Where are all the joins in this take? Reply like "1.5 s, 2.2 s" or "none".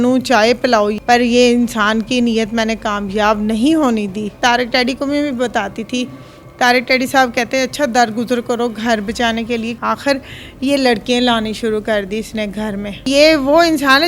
4.4 s, 9.7 s, 13.1 s